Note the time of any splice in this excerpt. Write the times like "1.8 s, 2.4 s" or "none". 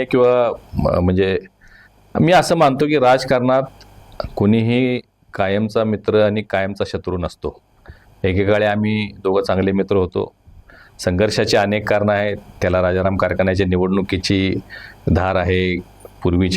none